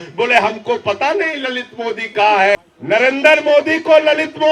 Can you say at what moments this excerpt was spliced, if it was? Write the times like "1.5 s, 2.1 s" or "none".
2.6 s